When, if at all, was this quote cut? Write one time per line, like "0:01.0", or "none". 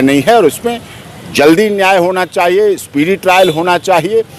none